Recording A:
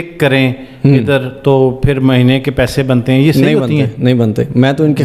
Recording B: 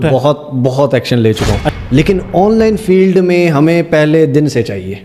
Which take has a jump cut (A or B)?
B